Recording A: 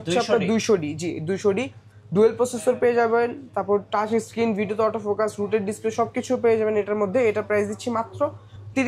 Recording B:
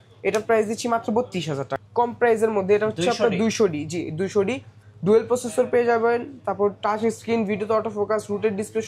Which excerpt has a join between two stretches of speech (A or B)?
B